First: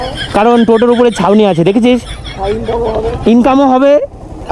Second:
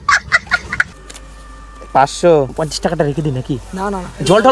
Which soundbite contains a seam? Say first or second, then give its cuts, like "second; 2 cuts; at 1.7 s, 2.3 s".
second; 2 cuts; at 0.9 s, 2.6 s